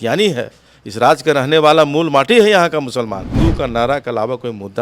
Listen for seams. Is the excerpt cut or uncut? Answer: cut